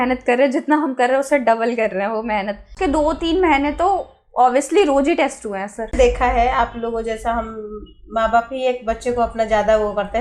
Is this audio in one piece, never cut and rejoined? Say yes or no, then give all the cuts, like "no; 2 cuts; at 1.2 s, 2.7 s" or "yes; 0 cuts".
no; 2 cuts; at 2.7 s, 5.9 s